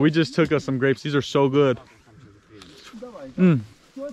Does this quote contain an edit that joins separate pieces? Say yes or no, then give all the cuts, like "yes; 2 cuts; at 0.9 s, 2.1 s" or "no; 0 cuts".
no; 0 cuts